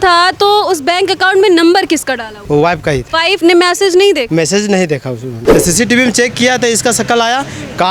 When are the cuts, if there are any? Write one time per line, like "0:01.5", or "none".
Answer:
0:02.3
0:03.3
0:04.3
0:05.3